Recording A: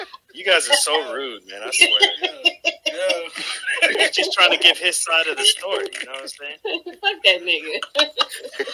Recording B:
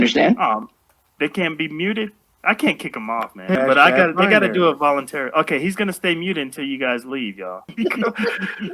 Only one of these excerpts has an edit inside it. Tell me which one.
B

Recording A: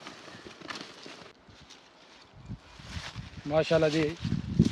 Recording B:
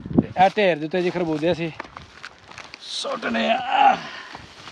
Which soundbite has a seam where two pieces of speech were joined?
A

